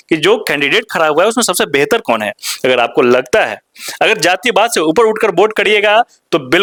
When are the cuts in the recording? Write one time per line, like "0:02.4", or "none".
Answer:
none